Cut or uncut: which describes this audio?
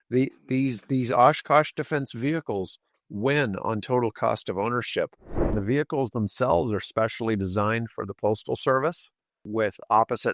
cut